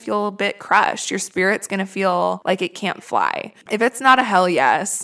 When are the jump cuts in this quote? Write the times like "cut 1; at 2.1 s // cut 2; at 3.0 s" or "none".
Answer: cut 1; at 2.4 s // cut 2; at 3.6 s